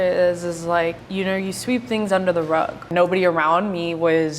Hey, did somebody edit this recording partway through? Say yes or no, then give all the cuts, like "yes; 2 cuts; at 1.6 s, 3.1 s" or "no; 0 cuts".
yes; 2 cuts; at 1.0 s, 2.9 s